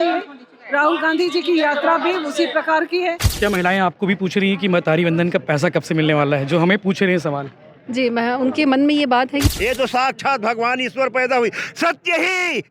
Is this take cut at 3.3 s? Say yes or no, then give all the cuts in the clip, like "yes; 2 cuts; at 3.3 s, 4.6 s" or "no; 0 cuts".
yes; 2 cuts; at 3.3 s, 9.5 s